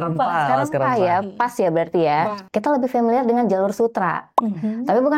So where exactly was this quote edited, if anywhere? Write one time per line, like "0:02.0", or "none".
0:02.4